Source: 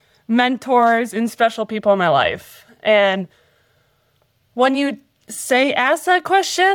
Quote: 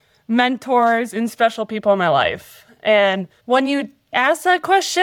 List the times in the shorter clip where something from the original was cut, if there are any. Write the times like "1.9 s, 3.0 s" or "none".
3.3 s, 4.1 s